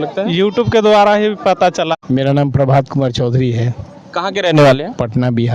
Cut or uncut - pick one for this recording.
cut